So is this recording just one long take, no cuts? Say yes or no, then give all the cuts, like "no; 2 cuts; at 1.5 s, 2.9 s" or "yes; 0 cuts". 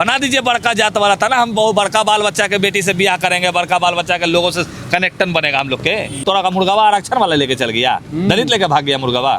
no; 1 cut; at 6.2 s